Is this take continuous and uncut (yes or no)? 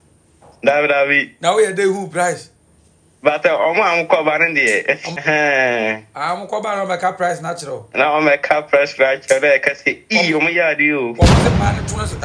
no